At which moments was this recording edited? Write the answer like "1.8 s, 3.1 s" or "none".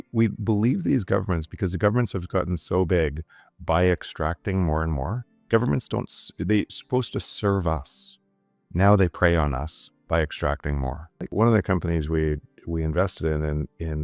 11.3 s